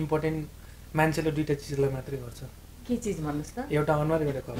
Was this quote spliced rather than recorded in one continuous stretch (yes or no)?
no